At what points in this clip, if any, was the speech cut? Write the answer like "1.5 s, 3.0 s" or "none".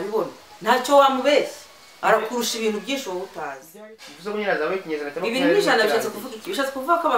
3.7 s